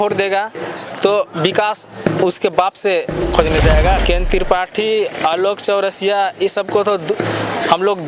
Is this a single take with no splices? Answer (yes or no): no